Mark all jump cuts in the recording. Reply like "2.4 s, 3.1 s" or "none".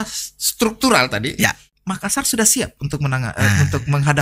1.7 s